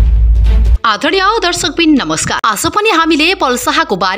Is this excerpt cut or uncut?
cut